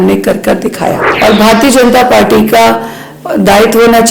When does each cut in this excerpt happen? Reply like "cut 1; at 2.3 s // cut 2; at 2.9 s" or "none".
cut 1; at 1.0 s